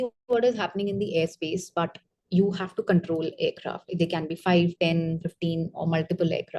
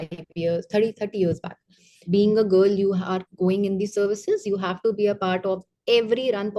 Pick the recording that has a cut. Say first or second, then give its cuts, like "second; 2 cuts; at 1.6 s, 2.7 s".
second; 1 cut; at 2.0 s